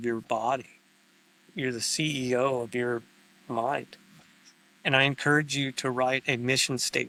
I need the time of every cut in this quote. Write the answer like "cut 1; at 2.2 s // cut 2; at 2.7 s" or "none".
none